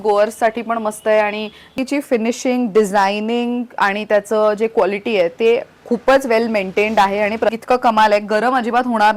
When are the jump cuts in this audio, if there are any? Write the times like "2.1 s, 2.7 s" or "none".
1.7 s, 7.6 s

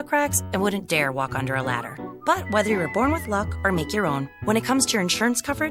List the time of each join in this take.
none

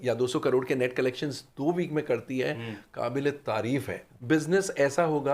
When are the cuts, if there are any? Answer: 4.1 s

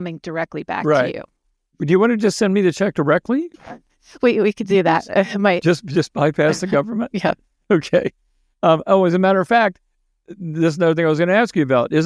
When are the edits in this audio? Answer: none

